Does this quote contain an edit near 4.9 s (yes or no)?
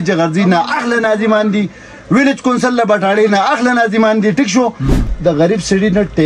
yes